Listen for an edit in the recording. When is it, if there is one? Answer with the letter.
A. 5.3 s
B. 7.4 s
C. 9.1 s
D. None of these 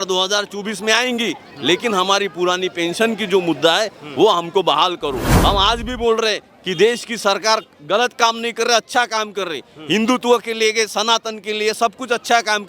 A